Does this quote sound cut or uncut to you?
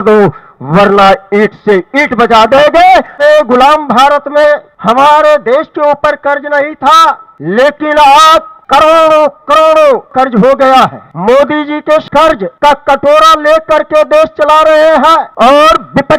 cut